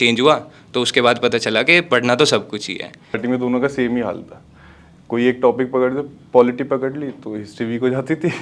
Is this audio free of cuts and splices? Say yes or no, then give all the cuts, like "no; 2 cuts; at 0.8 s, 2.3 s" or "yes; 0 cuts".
no; 1 cut; at 3.2 s